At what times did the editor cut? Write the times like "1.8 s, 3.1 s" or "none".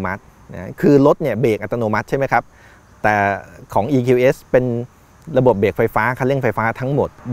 none